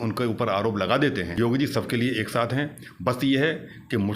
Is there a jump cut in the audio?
yes; 1 cut; at 1.3 s

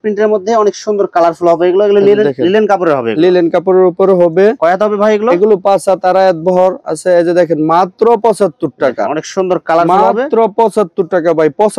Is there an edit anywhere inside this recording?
no; 0 cuts

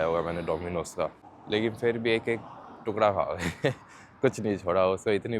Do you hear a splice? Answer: yes; 1 cut; at 1.3 s

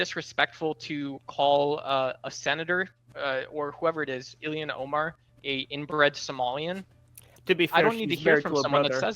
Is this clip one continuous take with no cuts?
no; 2 cuts; at 3.0 s, 5.3 s

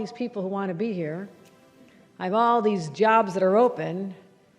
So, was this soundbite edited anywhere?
no; 0 cuts

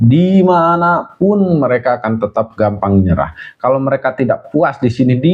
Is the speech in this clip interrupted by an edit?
no; 0 cuts

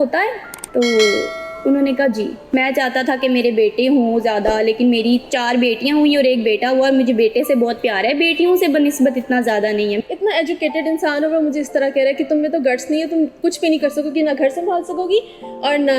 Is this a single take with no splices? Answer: no; 2 cuts; at 2.4 s, 10.0 s

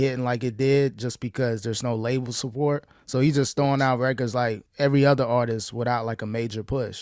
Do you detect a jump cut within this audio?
yes; 1 cut; at 4.6 s

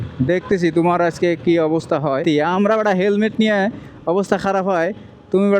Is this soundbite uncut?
no; 1 cut; at 2.2 s

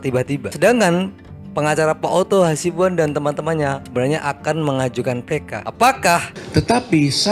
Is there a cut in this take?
yes; 1 cut; at 6.3 s

